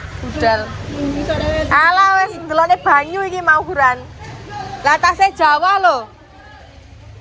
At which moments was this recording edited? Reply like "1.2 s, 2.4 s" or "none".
4.7 s